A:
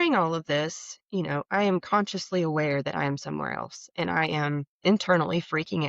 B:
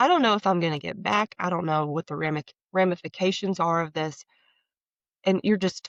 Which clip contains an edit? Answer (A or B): A